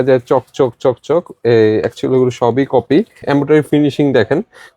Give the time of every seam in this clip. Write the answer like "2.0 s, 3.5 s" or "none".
3.2 s